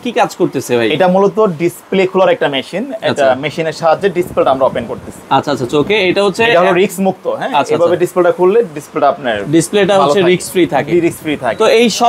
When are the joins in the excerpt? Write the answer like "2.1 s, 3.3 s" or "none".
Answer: none